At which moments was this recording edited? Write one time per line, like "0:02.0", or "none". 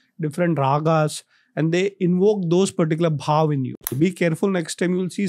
0:03.9